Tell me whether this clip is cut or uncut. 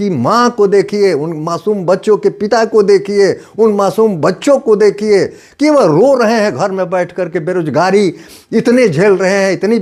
uncut